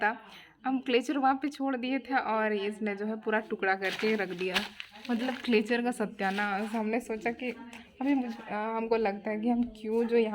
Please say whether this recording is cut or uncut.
uncut